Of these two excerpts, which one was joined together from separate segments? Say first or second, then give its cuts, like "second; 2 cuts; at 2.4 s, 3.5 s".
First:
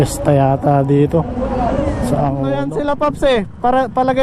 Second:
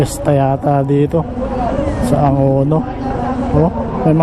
first; 1 cut; at 2.4 s